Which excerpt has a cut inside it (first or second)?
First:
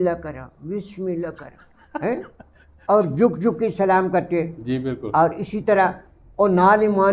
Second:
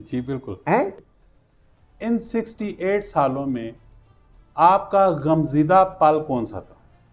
second